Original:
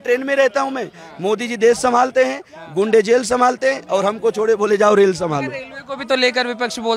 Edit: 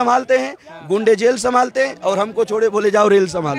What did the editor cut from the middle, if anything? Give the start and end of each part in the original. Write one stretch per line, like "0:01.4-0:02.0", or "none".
none

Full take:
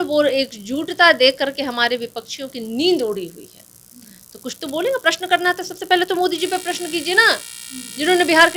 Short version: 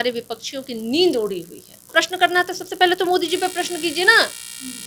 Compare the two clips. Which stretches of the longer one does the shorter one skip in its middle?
0:03.8-0:05.0

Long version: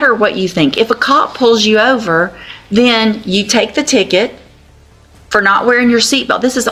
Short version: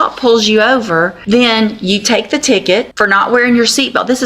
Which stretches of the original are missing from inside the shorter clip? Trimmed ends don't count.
0:02.3-0:02.6
0:04.4-0:05.3

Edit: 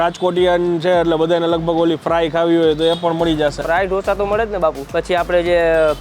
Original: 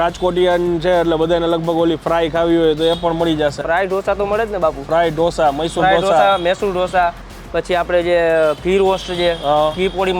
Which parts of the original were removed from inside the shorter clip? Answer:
0:04.8-0:07.4

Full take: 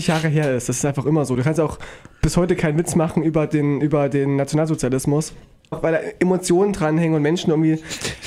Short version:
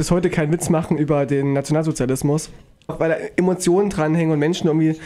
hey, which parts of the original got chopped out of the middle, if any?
0:03.2-0:03.8

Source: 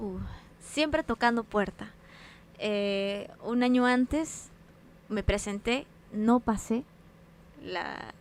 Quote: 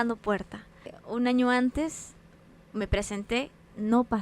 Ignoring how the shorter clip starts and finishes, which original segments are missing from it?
0:02.2-0:03.3

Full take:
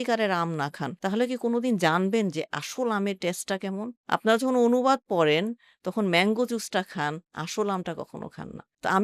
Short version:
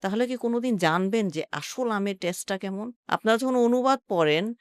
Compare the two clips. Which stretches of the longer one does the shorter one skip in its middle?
none

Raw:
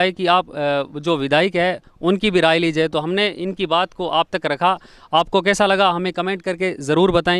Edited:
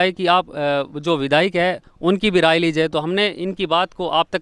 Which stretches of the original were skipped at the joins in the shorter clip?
none

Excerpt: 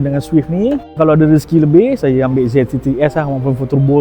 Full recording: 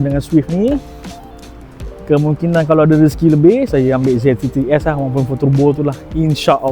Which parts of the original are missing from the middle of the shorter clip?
0:01.0-0:02.7

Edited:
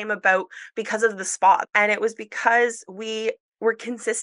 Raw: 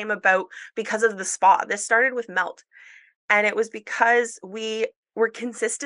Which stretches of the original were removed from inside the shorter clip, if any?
0:01.7-0:03.2

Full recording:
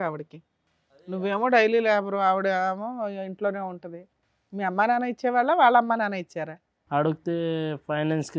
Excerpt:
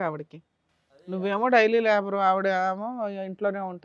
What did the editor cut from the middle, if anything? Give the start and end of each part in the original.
none

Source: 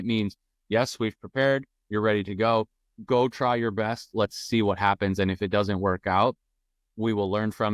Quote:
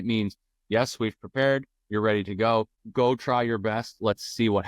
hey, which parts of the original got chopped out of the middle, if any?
0:02.8-0:02.9

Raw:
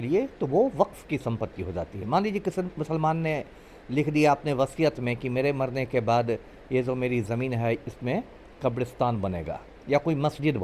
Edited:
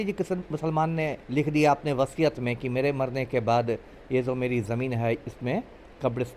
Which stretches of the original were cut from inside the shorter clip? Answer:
0:03.5-0:03.8

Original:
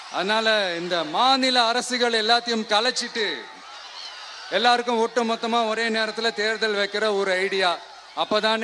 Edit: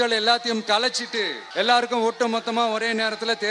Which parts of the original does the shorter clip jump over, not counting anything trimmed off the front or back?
0:03.4-0:04.4

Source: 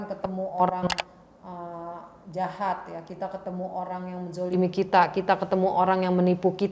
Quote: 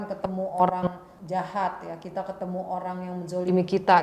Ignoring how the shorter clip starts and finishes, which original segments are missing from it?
0:00.9-0:02.0

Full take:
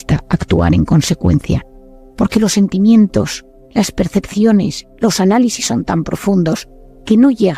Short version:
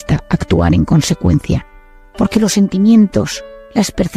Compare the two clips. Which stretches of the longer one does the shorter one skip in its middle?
none

